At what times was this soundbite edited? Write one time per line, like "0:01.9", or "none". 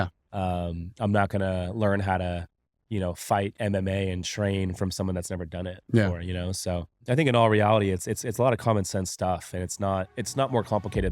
0:10.2